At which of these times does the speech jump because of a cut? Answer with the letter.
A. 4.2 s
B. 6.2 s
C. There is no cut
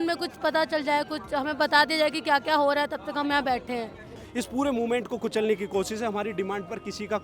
A